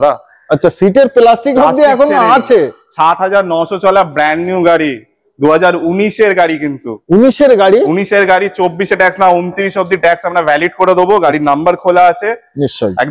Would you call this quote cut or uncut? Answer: uncut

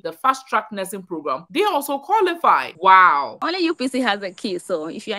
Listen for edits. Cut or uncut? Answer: cut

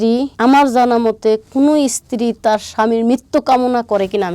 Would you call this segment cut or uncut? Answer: uncut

